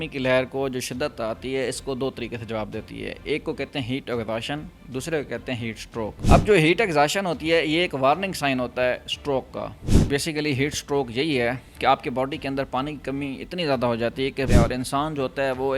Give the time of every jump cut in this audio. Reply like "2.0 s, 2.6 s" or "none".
6.2 s, 9.9 s, 14.5 s

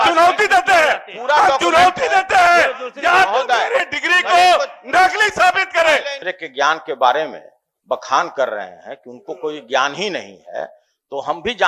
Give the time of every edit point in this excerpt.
6.1 s

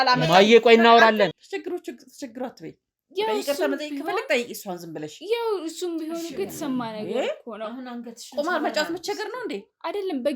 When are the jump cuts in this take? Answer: 1.3 s

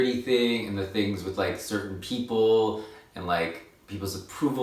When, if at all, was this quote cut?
none

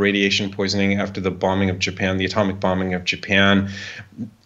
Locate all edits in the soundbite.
none

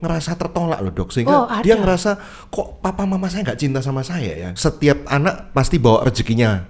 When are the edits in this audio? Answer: 4.5 s

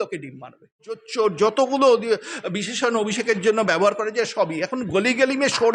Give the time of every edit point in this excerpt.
1.1 s

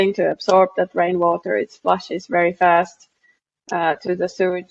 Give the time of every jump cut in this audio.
none

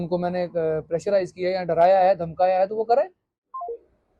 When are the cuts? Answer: 3.3 s

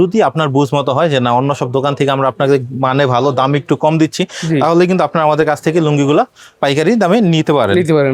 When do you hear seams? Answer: none

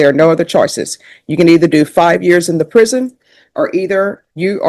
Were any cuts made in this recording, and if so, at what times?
none

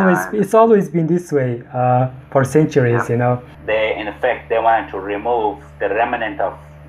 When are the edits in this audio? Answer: 3.5 s

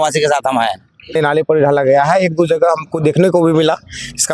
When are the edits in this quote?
1.1 s

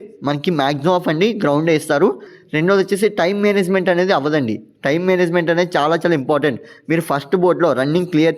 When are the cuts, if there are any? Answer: 2.3 s

